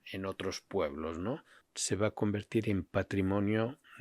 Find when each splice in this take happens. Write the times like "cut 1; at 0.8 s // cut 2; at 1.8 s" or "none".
cut 1; at 1.5 s